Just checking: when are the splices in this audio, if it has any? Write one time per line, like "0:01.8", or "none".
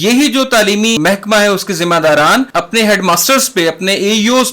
0:01.0
0:02.5